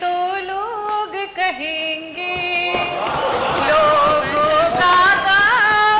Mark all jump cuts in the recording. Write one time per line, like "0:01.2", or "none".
none